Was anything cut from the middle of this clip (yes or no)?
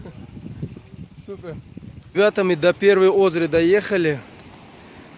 yes